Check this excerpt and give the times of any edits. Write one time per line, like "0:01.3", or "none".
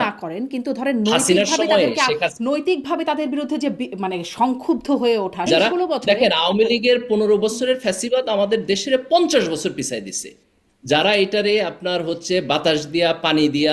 0:05.5